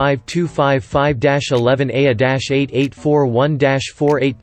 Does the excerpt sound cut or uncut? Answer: uncut